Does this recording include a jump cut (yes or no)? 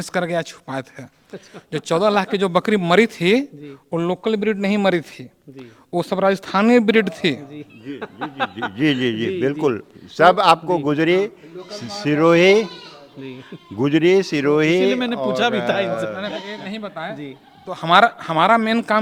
no